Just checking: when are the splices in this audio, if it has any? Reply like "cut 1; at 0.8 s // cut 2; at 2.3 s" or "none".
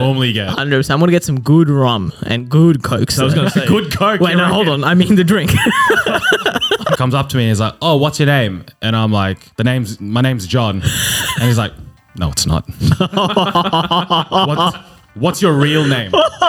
cut 1; at 7.0 s // cut 2; at 9.5 s